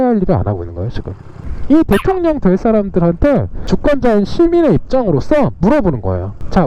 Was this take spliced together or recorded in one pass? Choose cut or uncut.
cut